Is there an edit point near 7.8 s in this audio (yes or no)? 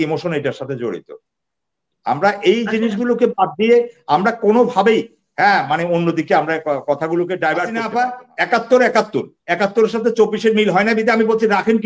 yes